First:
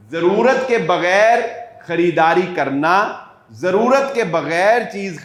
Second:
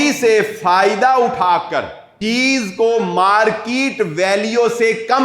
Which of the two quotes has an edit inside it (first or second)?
second